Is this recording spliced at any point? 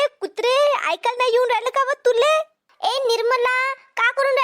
yes; 1 cut; at 2.7 s

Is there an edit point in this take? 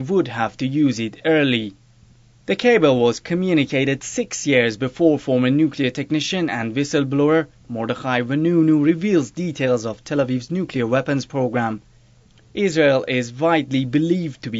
yes; 1 cut; at 2.0 s

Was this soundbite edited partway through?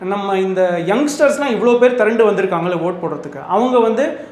no; 0 cuts

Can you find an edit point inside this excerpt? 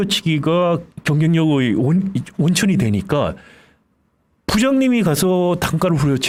no; 0 cuts

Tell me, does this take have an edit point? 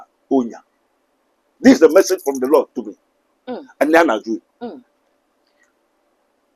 no; 0 cuts

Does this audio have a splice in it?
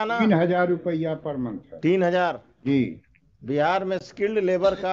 no; 0 cuts

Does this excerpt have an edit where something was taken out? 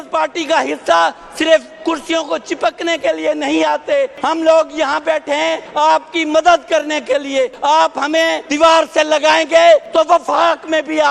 yes; 5 cuts; at 4.2 s, 5.6 s, 7.5 s, 8.4 s, 9.9 s

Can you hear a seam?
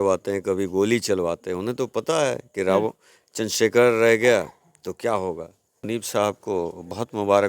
yes; 1 cut; at 5.9 s

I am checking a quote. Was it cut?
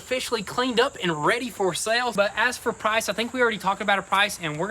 yes; 1 cut; at 2.1 s

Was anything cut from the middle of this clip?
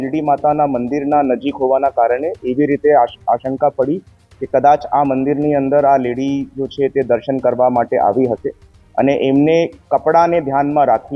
no; 0 cuts

